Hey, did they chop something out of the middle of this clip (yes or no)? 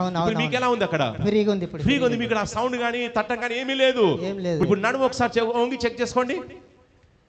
yes